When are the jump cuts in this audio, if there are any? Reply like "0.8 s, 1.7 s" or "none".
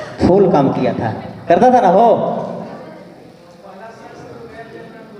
none